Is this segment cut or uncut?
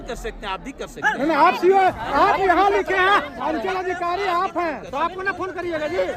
uncut